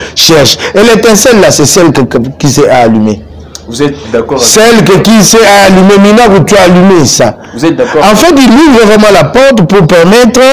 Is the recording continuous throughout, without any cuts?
yes; 0 cuts

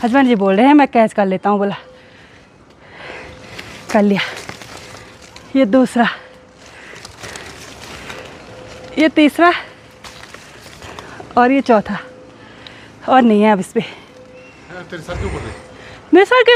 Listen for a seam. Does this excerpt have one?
no; 0 cuts

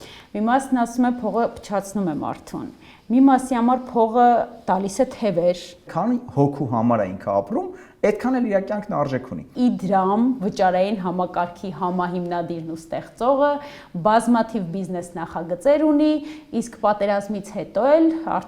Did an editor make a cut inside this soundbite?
yes; 2 cuts; at 5.9 s, 9.5 s

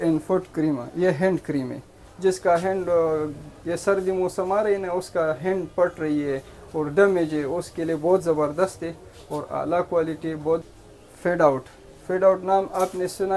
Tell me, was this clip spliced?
yes; 1 cut; at 10.6 s

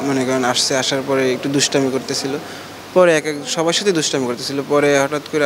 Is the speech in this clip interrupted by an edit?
no; 0 cuts

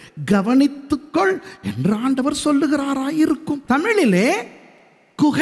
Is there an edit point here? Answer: yes; 1 cut; at 3.6 s

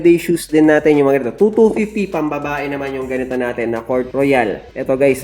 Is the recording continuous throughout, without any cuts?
yes; 0 cuts

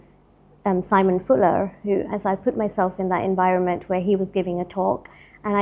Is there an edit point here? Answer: no; 0 cuts

